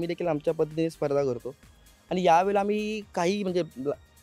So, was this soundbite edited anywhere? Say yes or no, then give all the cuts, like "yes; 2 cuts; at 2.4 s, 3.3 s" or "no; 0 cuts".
no; 0 cuts